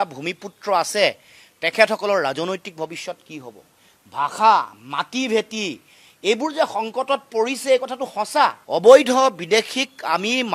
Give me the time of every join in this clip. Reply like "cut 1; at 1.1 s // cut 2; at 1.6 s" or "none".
cut 1; at 8.6 s